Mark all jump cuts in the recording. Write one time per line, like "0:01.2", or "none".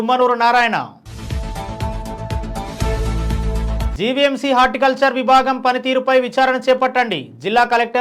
none